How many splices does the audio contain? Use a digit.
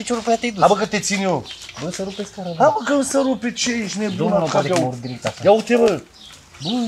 0